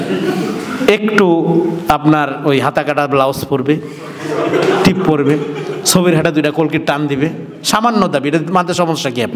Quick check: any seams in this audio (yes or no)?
no